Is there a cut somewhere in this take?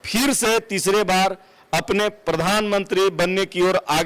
no; 0 cuts

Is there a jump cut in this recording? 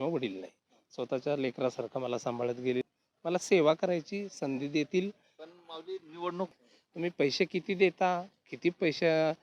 yes; 2 cuts; at 2.8 s, 6.5 s

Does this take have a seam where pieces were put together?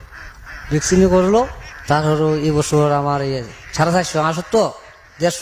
no; 0 cuts

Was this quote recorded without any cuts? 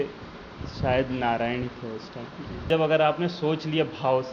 no; 1 cut; at 2.7 s

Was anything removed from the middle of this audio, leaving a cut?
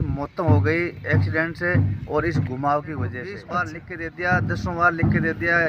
yes; 1 cut; at 3.4 s

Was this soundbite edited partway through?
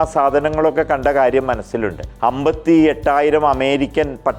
yes; 1 cut; at 2.0 s

